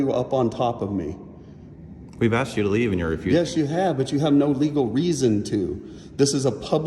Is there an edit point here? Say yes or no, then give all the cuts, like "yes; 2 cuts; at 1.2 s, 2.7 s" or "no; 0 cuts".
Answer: no; 0 cuts